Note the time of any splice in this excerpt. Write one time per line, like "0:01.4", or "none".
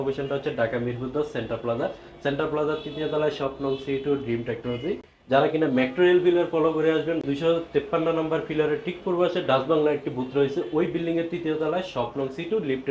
0:07.2

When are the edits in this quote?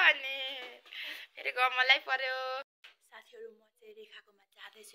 0:02.8

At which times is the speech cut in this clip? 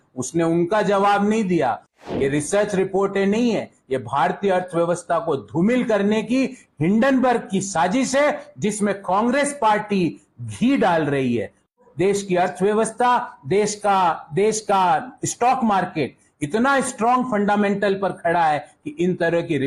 0:01.9
0:11.8

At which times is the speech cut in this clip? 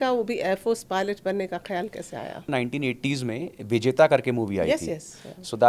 0:02.5

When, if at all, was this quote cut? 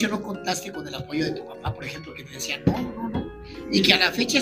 none

